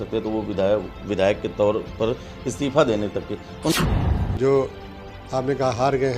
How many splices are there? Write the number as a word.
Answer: one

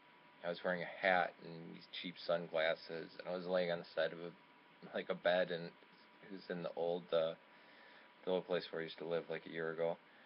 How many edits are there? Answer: one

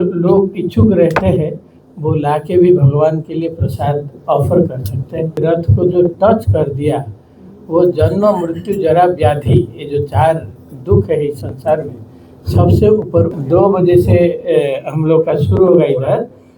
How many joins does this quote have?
two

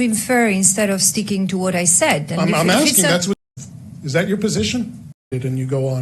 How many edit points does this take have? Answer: two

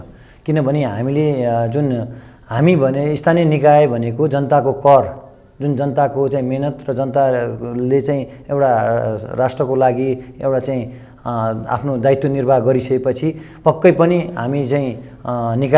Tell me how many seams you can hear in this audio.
zero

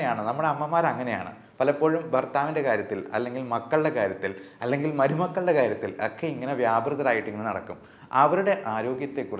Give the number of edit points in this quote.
zero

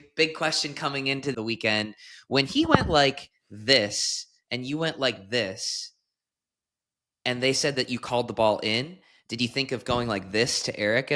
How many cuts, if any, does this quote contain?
one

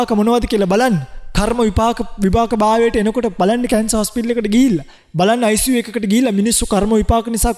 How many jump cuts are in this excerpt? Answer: one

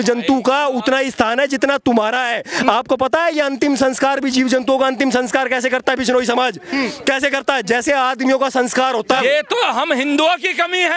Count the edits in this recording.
one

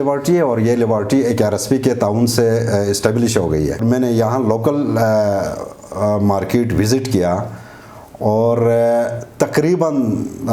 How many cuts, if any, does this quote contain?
one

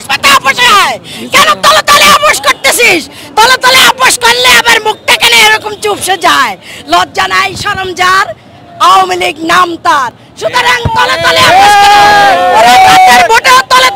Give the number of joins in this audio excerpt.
zero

